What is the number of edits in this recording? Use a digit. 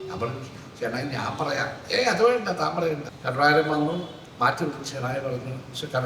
2